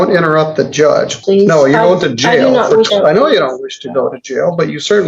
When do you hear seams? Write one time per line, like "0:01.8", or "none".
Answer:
0:01.2
0:02.9